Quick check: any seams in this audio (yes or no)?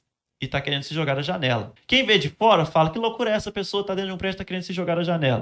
yes